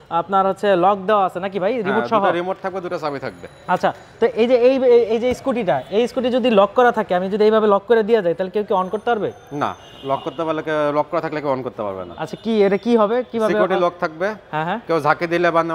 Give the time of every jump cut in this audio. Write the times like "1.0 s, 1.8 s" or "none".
none